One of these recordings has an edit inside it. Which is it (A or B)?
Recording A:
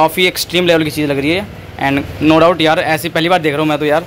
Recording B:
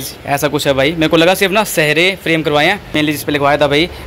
B